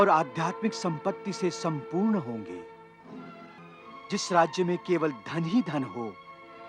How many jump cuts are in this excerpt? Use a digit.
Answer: 1